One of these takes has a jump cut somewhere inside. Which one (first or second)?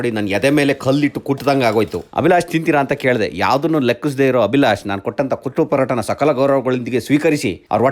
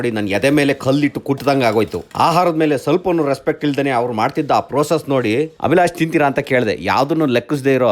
first